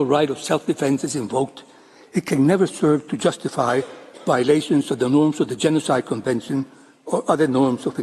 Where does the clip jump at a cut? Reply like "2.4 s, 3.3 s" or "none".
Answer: none